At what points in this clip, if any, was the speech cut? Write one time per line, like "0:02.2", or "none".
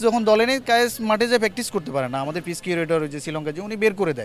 none